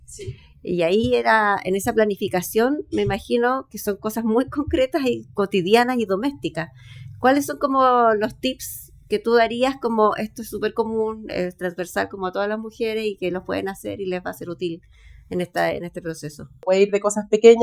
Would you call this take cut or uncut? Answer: cut